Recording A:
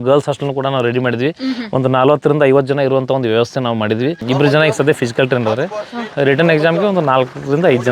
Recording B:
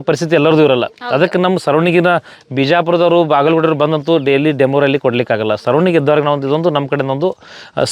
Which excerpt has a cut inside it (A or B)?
A